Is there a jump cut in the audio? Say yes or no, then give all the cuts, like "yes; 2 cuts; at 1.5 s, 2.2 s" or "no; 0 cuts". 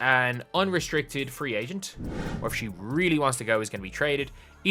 no; 0 cuts